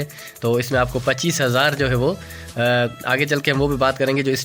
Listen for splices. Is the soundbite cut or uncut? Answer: uncut